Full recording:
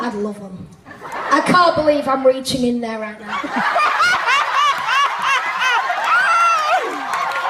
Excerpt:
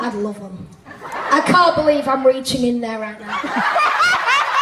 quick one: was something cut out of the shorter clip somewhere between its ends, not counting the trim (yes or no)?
no